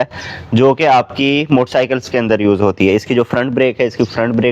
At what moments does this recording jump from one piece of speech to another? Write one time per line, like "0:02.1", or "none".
none